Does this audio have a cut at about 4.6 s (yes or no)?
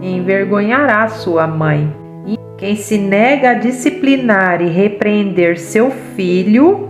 no